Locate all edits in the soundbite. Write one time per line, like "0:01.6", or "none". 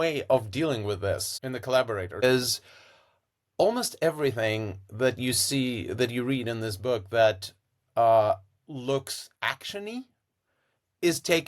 0:01.3
0:02.2